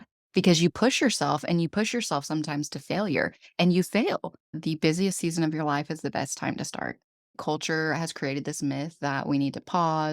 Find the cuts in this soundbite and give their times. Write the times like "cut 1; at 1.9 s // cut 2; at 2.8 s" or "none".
cut 1; at 4.5 s // cut 2; at 7.4 s